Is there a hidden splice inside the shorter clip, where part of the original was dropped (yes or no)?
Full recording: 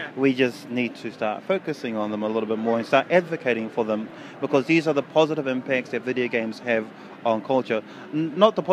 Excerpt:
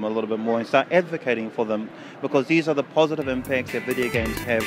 no